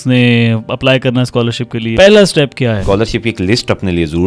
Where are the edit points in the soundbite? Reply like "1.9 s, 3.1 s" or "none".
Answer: 1.9 s, 2.8 s